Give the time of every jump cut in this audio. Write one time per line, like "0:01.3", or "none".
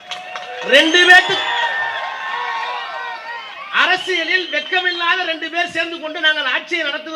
none